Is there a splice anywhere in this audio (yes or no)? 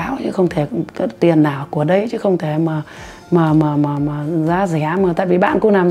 no